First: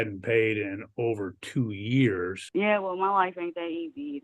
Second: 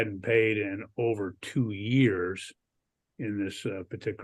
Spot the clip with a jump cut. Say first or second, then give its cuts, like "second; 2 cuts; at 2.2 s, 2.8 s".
first; 1 cut; at 2.4 s